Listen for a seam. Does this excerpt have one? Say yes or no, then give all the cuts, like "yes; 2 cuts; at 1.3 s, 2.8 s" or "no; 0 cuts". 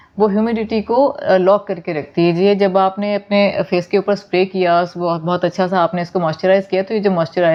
no; 0 cuts